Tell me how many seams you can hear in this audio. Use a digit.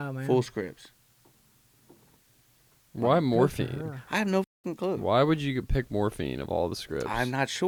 0